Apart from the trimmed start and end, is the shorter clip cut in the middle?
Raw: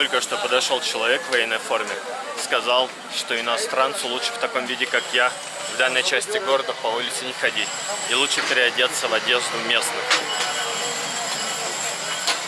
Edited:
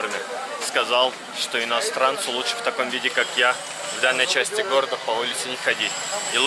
no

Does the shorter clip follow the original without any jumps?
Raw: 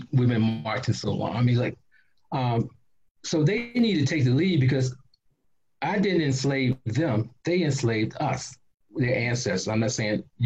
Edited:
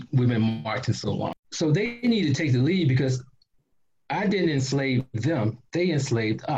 no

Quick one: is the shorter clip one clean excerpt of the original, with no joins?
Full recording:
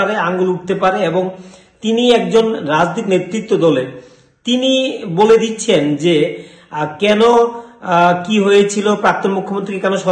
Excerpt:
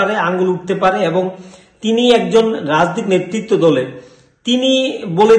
yes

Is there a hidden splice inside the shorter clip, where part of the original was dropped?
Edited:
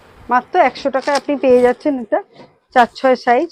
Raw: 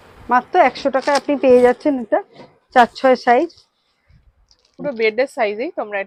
no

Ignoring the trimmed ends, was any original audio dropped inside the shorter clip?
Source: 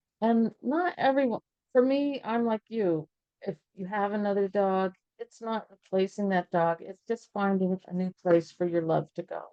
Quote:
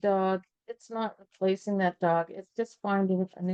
no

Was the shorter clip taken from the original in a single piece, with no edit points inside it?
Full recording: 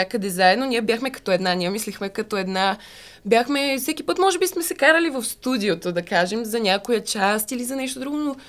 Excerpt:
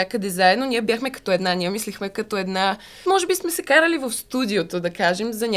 no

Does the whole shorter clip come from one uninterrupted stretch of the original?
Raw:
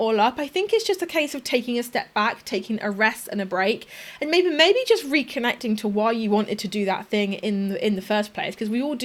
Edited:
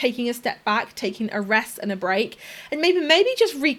yes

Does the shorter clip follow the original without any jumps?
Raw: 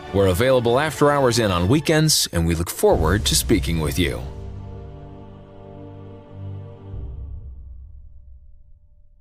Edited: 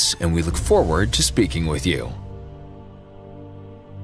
no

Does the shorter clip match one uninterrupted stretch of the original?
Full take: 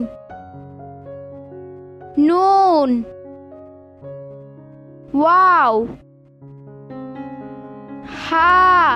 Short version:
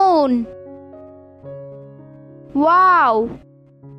yes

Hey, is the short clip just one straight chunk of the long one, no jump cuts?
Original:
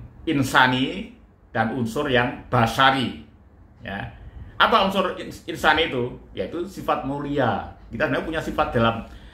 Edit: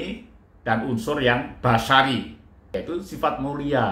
no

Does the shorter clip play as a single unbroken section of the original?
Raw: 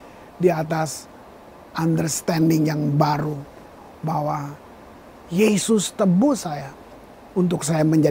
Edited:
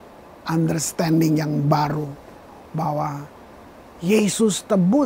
yes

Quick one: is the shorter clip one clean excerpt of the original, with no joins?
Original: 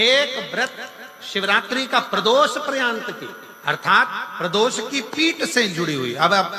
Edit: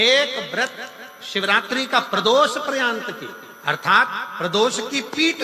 yes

